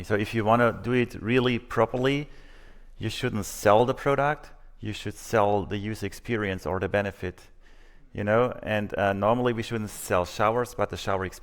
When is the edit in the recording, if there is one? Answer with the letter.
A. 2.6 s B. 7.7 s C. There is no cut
C